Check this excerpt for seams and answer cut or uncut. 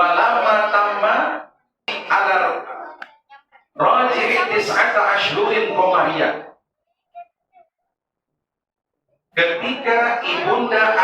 cut